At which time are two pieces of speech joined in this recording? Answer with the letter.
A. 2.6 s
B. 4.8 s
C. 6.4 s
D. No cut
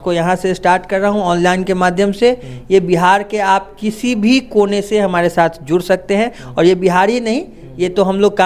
D